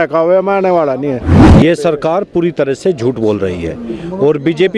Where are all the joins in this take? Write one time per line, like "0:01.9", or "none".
0:01.5